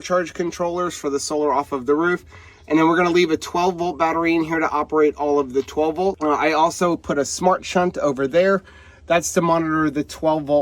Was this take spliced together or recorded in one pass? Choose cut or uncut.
cut